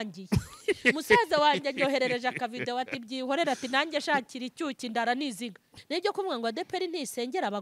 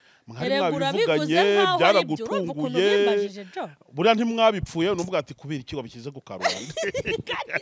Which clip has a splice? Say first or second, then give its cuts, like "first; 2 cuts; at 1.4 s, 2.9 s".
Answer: first; 1 cut; at 5.8 s